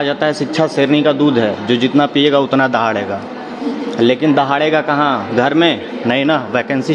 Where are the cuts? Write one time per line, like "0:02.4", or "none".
none